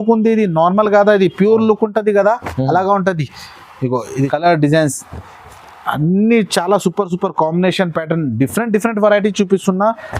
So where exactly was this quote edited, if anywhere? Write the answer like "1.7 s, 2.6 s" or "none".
4.3 s